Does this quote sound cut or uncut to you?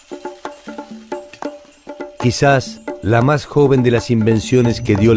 uncut